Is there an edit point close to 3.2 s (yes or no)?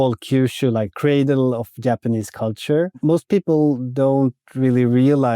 no